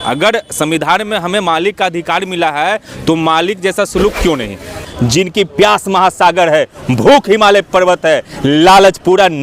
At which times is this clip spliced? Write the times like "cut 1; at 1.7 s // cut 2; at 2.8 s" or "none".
cut 1; at 4.8 s